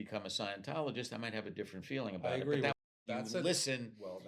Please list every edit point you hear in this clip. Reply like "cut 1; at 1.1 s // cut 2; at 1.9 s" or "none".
cut 1; at 2.8 s